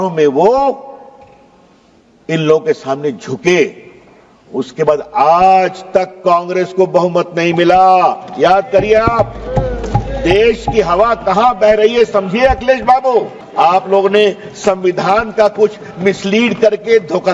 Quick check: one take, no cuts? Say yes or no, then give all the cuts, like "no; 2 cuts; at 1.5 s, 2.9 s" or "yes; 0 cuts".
no; 1 cut; at 13.4 s